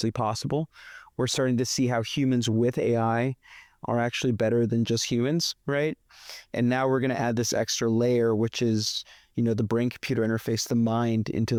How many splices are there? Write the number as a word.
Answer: zero